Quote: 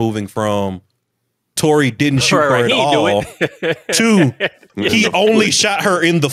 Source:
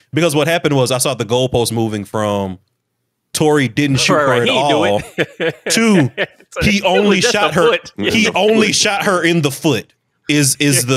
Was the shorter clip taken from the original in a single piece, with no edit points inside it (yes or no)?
no